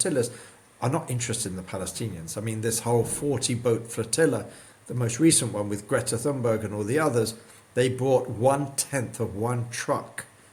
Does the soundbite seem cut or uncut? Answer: uncut